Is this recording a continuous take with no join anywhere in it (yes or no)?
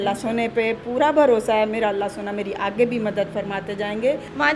yes